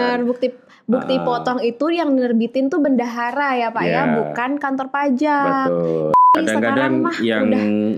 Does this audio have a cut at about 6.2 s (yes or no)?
yes